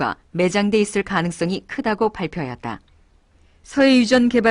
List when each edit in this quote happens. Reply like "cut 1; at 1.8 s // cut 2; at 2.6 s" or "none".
cut 1; at 1.3 s